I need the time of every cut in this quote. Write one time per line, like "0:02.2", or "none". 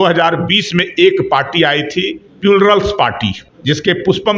0:02.2
0:03.5